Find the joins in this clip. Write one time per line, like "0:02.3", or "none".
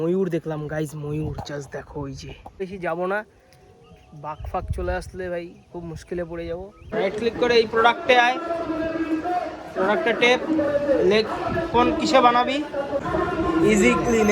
0:02.6
0:06.9
0:13.0

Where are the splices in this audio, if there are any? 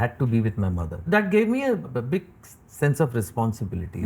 0:01.0
0:01.9

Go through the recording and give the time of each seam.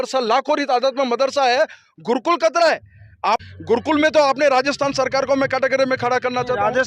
0:03.4

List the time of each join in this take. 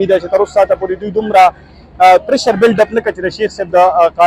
none

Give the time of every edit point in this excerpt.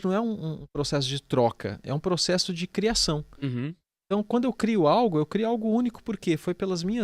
none

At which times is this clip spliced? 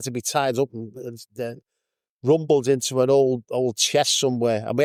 none

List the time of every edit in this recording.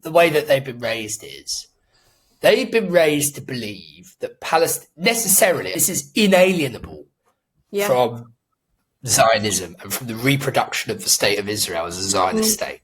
none

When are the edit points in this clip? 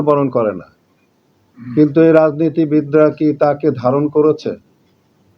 none

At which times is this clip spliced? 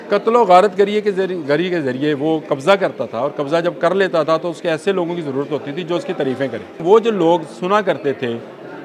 0:06.8

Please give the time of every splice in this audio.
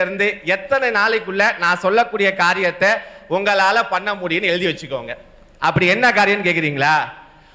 none

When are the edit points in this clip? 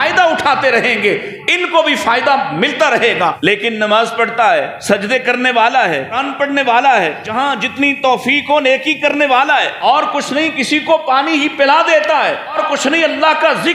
0:03.4
0:04.7
0:06.3
0:07.2
0:09.8
0:12.6

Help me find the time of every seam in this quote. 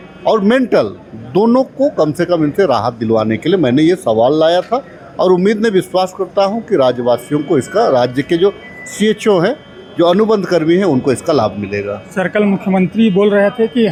none

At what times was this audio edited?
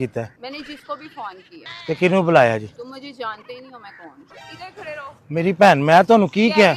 none

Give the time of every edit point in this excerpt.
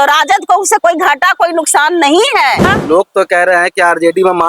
0:02.7

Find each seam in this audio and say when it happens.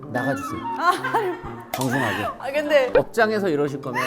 0:02.9

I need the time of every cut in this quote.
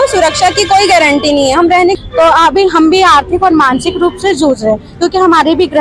0:02.0

